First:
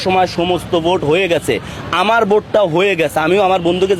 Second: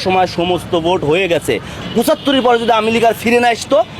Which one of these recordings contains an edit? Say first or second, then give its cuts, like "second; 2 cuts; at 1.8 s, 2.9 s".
second; 1 cut; at 1.8 s